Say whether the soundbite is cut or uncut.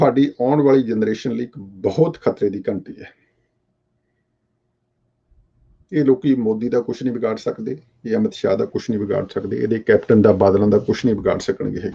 uncut